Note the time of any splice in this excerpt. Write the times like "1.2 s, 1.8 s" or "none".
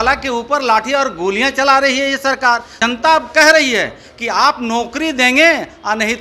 2.7 s